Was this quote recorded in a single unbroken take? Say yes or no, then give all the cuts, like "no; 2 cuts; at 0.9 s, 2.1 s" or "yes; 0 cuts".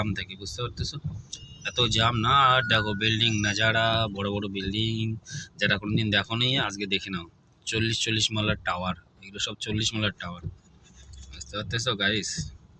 yes; 0 cuts